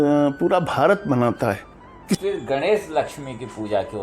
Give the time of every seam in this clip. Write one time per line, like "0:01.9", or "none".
0:02.2